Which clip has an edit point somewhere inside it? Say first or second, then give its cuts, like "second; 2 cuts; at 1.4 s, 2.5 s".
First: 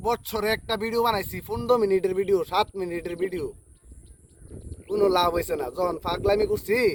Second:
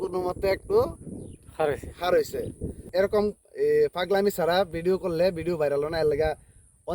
second; 1 cut; at 2.7 s